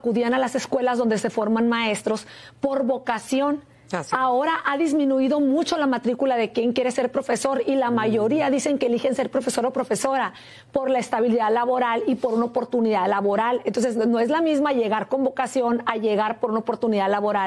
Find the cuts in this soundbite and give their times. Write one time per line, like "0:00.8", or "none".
none

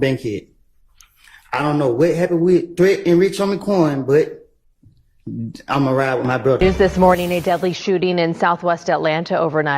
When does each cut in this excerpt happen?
0:06.6

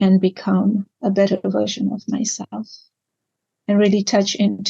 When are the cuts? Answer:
0:00.9

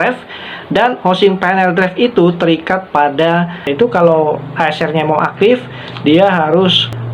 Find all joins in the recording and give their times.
0:03.7

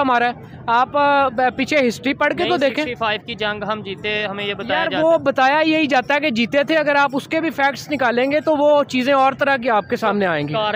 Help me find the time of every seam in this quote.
none

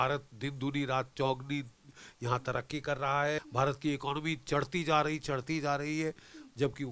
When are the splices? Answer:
0:03.4

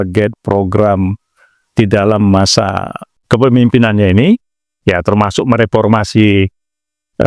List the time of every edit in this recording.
0:03.1

